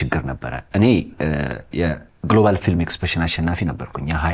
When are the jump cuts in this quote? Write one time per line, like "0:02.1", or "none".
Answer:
none